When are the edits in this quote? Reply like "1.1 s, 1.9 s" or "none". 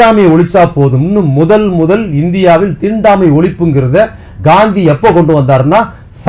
none